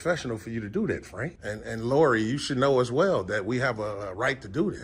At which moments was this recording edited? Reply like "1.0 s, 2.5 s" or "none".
1.4 s